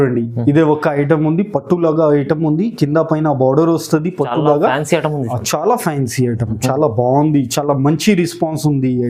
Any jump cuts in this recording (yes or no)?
no